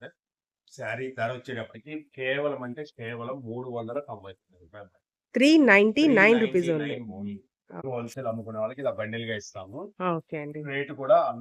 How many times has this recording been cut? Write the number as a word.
one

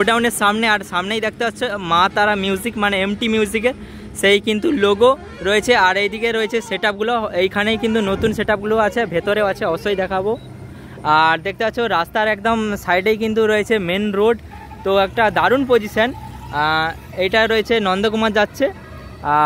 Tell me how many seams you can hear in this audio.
zero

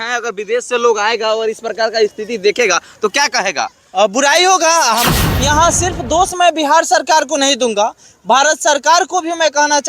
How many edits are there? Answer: one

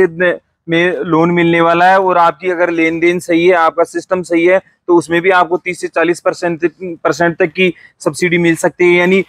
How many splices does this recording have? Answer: zero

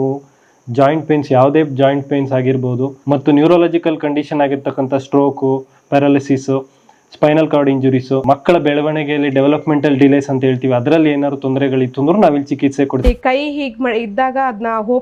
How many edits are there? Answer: two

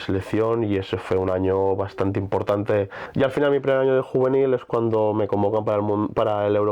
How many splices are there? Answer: one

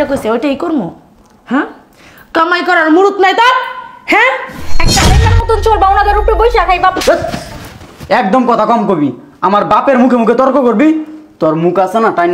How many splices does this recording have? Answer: one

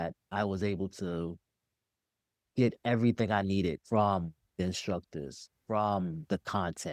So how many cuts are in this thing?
one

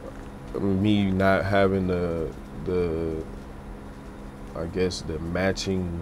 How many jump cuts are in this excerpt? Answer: zero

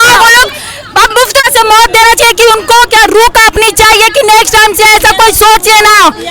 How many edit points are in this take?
one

